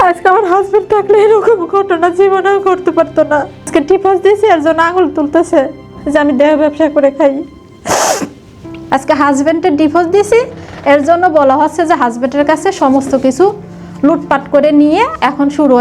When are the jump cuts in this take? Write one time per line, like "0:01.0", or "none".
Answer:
0:03.6
0:08.7